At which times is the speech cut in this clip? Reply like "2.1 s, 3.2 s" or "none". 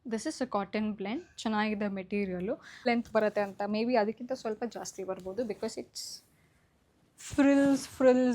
2.9 s